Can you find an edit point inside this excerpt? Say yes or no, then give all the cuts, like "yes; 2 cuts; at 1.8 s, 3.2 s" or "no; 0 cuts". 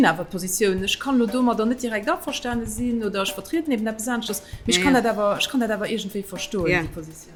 no; 0 cuts